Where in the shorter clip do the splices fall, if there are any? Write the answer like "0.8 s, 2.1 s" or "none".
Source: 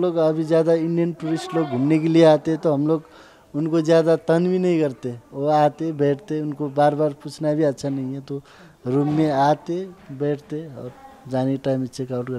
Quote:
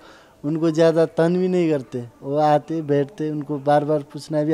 none